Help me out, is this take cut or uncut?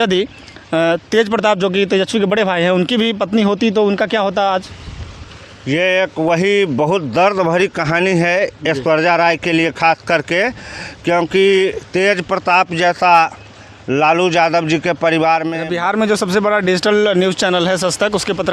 cut